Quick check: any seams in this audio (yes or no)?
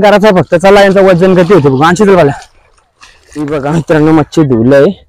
yes